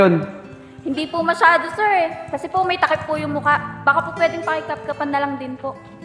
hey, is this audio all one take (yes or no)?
yes